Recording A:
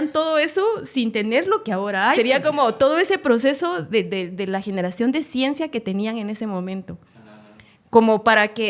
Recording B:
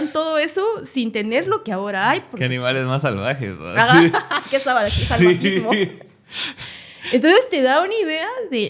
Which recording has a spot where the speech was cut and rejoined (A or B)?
A